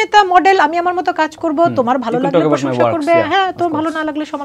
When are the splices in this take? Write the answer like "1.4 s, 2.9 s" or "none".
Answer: none